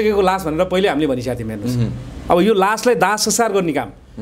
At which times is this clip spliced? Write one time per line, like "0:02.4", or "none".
none